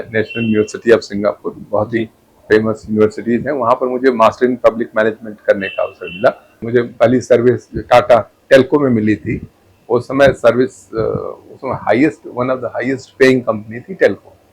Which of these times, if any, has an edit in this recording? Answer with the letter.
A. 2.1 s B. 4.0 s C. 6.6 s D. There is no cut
C